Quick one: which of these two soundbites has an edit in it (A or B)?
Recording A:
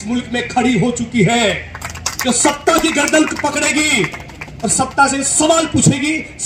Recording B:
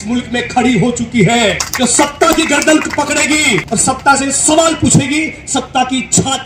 B